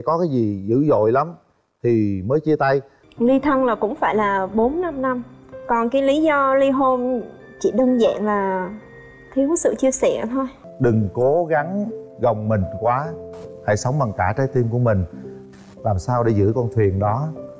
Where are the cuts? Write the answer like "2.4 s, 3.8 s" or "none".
3.0 s, 10.6 s